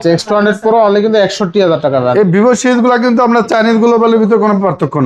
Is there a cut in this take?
no; 0 cuts

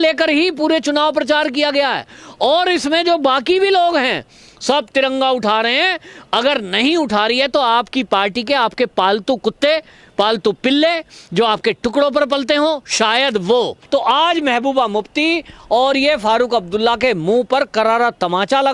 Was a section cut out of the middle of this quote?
yes; 1 cut; at 13.8 s

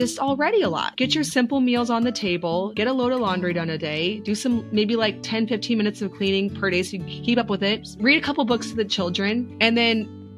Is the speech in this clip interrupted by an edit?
yes; 4 cuts; at 0.9 s, 2.7 s, 7.9 s, 9.5 s

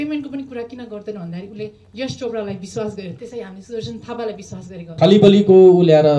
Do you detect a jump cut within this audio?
yes; 1 cut; at 4.9 s

